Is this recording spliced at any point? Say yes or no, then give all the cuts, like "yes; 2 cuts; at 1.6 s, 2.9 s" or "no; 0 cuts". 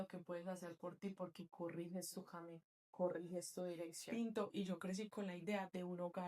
yes; 1 cut; at 4.0 s